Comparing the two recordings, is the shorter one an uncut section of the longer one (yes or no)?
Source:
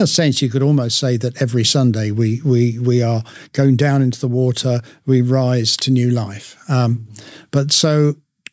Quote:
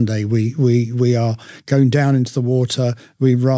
yes